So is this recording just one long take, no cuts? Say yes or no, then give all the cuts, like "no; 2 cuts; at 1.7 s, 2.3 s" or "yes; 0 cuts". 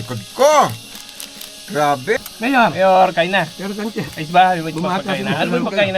no; 1 cut; at 2.2 s